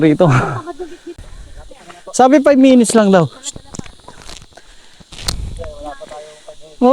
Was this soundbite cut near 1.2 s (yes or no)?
yes